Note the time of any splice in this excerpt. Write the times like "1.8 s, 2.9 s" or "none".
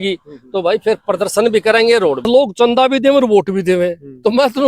2.2 s

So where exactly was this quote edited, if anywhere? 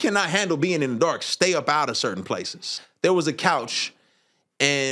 2.8 s

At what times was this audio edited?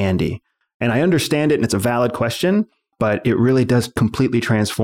2.8 s, 3.9 s

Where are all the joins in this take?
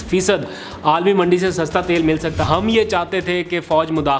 2.5 s

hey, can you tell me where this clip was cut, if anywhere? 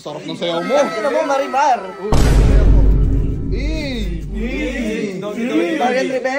none

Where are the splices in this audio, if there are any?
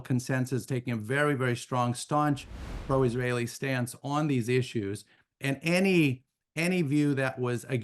none

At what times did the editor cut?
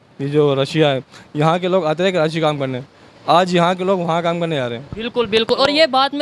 none

